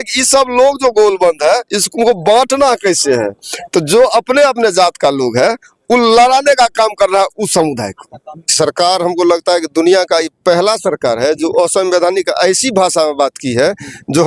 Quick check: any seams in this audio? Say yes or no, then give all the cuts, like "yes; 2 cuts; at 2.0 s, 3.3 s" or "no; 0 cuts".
yes; 1 cut; at 8.4 s